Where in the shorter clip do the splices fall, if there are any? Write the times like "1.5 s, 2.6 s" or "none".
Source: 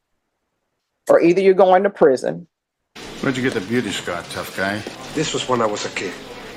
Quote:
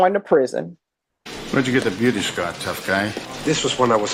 none